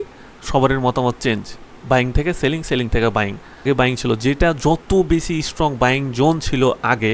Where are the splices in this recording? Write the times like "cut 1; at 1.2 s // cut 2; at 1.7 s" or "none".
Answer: cut 1; at 3.6 s